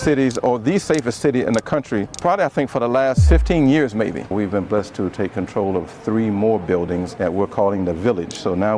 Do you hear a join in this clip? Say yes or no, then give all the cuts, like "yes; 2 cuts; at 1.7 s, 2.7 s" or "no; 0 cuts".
yes; 2 cuts; at 4.3 s, 7.1 s